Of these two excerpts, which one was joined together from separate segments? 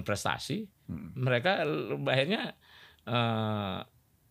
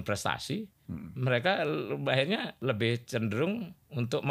second; 1 cut; at 2.5 s

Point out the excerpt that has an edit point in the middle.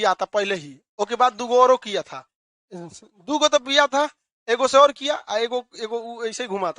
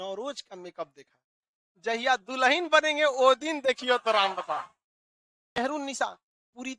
second; 1 cut; at 5.6 s

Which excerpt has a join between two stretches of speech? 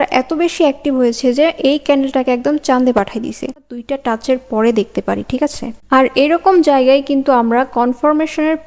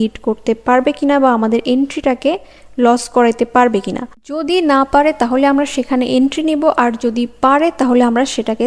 first; 1 cut; at 3.6 s

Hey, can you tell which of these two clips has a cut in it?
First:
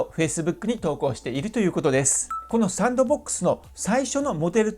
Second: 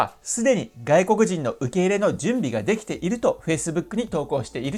first; 1 cut; at 2.4 s

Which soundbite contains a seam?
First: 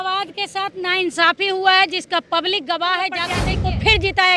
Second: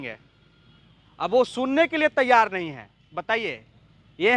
first; 1 cut; at 3.3 s

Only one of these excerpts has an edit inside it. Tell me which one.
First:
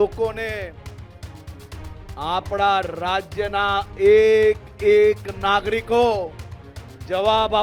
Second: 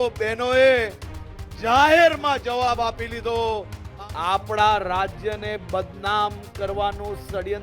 second; 1 cut; at 3.8 s

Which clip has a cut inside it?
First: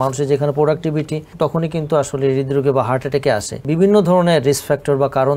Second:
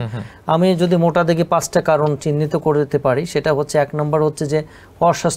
first; 2 cuts; at 1.2 s, 3.6 s

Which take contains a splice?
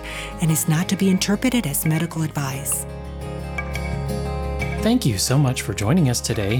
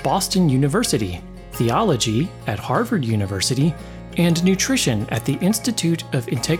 first; 2 cuts; at 2.6 s, 4.8 s

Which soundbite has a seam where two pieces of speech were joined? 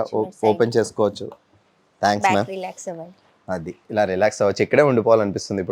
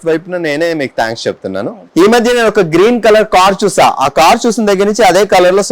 second; 1 cut; at 1.8 s

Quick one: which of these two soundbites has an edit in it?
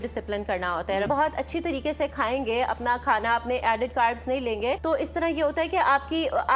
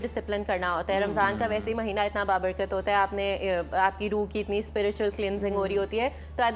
first; 2 cuts; at 1.1 s, 4.8 s

